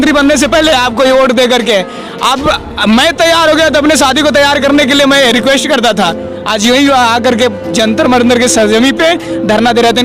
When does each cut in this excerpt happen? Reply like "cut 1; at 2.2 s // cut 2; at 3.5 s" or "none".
none